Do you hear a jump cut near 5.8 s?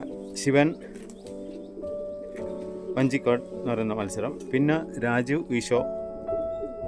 yes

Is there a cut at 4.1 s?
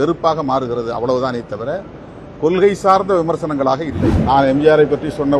yes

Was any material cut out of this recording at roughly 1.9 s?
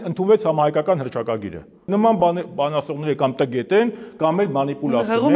yes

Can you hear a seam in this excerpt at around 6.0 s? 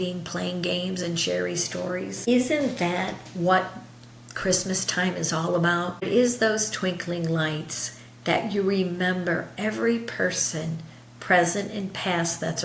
yes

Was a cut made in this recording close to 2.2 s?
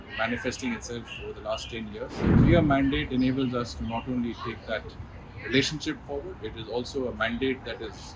yes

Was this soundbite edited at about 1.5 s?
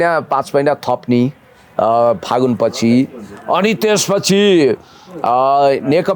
no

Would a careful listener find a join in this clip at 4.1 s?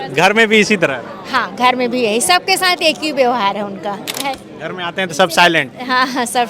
yes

